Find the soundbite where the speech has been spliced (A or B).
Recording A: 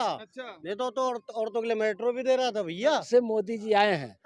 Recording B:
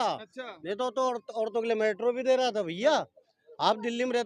A